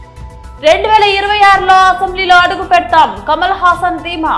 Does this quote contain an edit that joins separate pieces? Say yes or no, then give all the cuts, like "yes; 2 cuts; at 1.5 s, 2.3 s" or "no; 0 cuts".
no; 0 cuts